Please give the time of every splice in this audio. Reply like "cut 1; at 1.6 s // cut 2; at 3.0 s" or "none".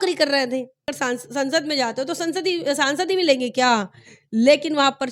cut 1; at 0.9 s